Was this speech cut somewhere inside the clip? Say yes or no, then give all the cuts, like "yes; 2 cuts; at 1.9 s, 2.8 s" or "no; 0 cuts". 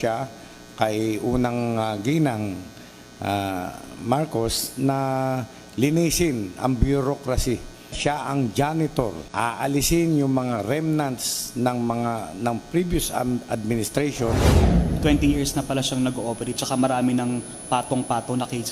yes; 3 cuts; at 8.0 s, 9.2 s, 14.7 s